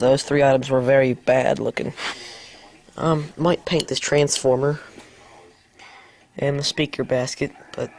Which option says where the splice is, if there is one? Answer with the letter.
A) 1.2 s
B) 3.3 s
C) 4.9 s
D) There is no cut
C